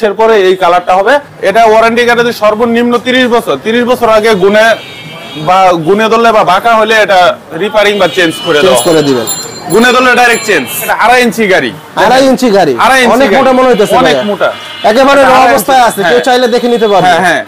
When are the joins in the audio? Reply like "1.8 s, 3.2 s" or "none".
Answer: 1.3 s, 10.9 s